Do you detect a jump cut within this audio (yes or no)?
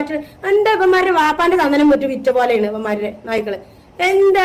no